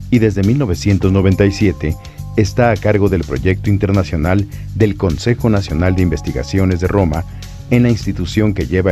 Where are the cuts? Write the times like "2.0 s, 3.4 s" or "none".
1.3 s